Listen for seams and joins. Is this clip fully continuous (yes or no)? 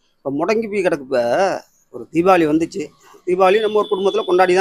yes